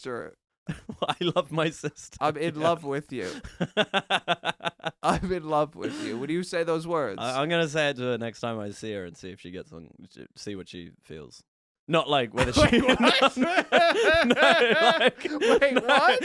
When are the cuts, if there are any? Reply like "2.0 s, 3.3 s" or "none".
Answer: none